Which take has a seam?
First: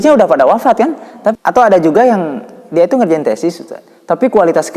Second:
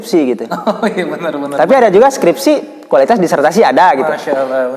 first; 1 cut; at 1.3 s

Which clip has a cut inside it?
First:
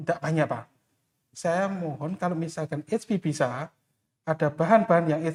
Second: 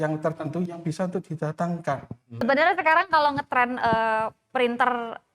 second; 1 cut; at 2.4 s

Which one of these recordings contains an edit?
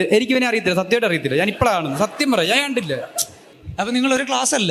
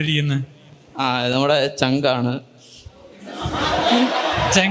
first; 1 cut; at 3.5 s

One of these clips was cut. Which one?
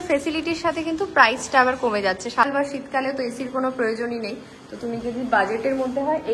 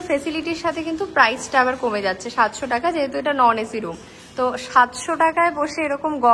first; 1 cut; at 2.4 s

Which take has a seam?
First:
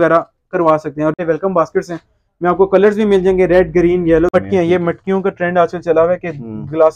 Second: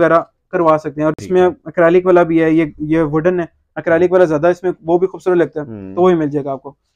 first; 2 cuts; at 1.2 s, 4.3 s

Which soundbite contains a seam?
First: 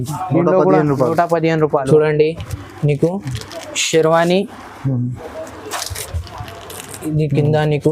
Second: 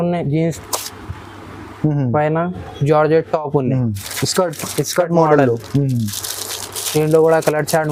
first; 1 cut; at 1.9 s

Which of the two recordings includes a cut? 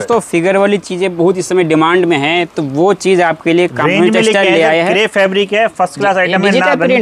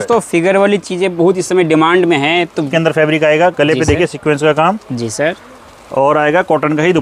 second; 1 cut; at 2.7 s

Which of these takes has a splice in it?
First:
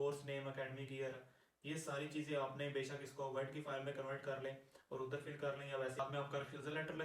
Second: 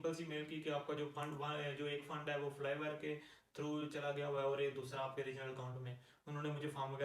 first; 1 cut; at 6.0 s

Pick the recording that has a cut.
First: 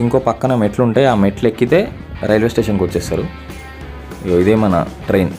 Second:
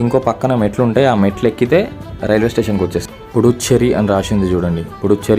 second; 1 cut; at 3.1 s

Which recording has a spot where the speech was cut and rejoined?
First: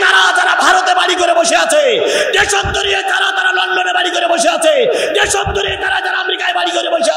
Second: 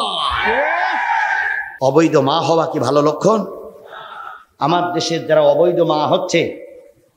second; 1 cut; at 1.6 s

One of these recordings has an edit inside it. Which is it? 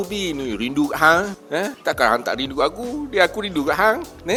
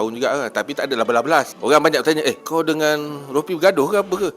second; 1 cut; at 1.5 s

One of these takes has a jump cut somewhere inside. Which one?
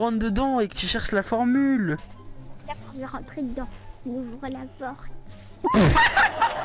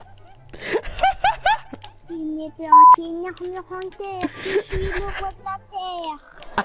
second; 2 cuts; at 2.6 s, 3.2 s

